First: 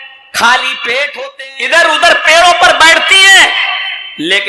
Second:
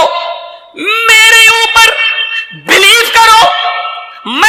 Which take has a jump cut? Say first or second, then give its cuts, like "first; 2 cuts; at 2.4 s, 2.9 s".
first; 1 cut; at 1.1 s